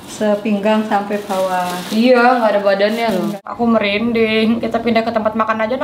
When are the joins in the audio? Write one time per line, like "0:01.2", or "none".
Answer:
0:03.4